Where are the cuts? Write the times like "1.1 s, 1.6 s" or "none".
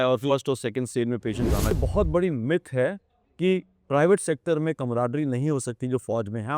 1.7 s